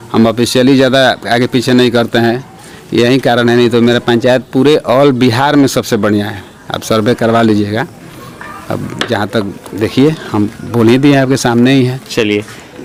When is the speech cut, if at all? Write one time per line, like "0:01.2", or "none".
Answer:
none